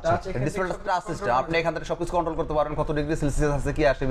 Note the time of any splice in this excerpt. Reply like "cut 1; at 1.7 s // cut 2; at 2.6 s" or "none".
none